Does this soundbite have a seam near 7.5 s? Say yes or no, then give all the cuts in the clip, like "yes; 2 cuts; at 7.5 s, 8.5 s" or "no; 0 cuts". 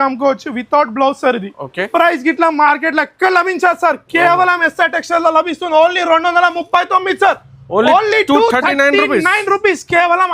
no; 1 cut; at 1.9 s